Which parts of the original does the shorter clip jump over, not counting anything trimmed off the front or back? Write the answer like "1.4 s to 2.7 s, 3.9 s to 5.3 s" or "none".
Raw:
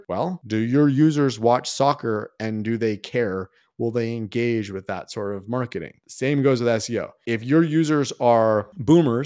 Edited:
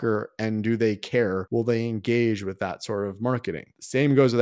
3.4 s to 3.7 s